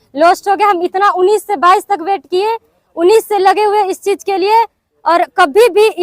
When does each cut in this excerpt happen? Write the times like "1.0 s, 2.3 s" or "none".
none

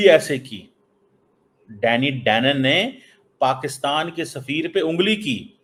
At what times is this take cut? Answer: none

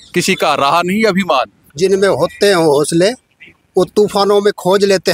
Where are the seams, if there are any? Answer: 1.6 s

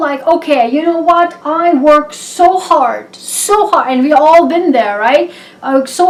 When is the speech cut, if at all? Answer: none

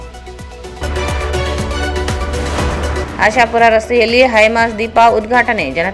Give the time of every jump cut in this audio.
none

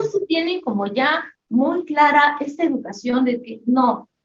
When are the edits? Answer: none

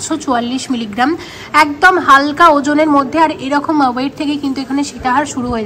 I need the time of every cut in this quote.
none

